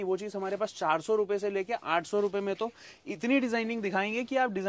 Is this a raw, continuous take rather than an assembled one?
yes; 0 cuts

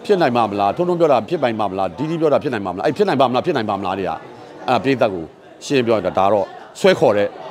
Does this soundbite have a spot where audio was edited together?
no; 0 cuts

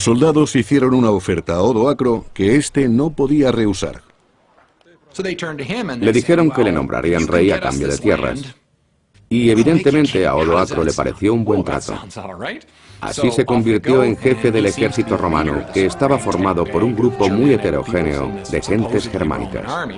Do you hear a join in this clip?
no; 0 cuts

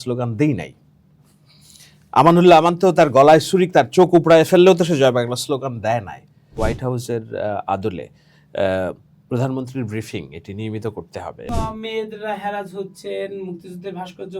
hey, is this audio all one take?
no; 2 cuts; at 6.5 s, 11.5 s

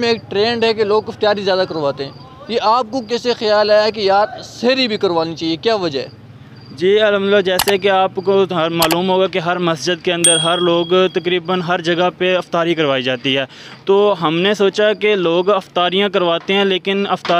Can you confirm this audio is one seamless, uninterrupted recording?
yes; 0 cuts

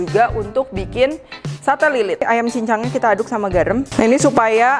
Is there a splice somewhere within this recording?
yes; 2 cuts; at 2.2 s, 3.9 s

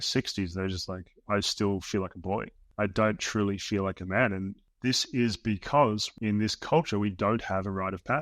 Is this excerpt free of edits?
no; 3 cuts; at 2.6 s, 4.6 s, 6.1 s

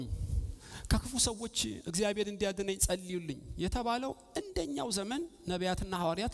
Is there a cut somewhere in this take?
no; 0 cuts

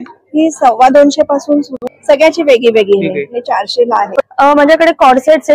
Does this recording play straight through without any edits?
no; 1 cut; at 4.2 s

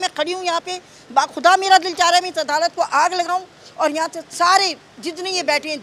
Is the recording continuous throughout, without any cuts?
yes; 0 cuts

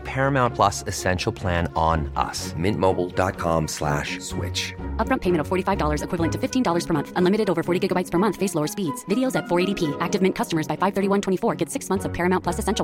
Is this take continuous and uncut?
yes; 0 cuts

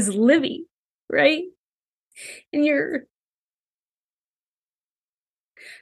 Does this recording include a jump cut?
no; 0 cuts

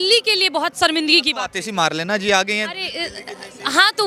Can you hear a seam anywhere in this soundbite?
no; 0 cuts

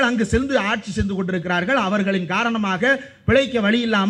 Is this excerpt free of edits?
yes; 0 cuts

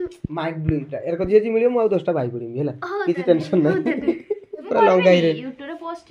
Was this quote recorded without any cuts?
no; 1 cut; at 4.7 s

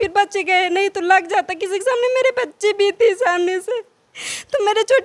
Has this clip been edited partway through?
no; 0 cuts

